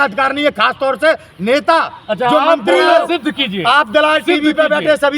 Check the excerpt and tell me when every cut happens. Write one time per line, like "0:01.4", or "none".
0:03.1